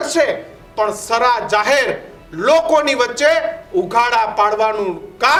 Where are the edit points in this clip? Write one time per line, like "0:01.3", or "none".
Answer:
none